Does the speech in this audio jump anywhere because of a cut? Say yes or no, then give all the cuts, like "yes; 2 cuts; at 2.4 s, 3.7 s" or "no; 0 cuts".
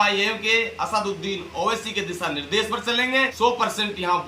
yes; 1 cut; at 3.3 s